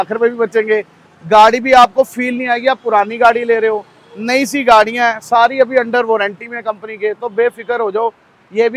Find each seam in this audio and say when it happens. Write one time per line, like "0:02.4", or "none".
none